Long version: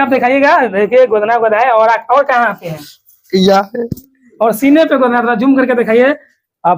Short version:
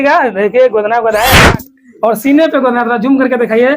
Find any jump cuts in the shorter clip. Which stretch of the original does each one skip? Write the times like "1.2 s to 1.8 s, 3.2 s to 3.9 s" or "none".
1.7 s to 3.7 s